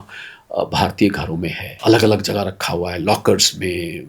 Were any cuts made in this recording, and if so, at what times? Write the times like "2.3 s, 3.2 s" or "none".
1.6 s